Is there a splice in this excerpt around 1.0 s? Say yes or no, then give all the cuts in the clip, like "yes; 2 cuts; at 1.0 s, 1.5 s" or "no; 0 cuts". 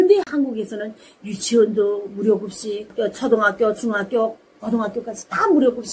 no; 0 cuts